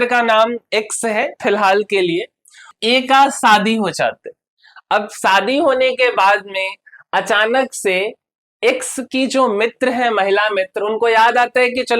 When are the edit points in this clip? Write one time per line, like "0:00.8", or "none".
0:02.7